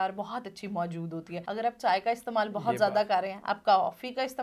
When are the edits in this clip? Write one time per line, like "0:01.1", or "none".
0:01.4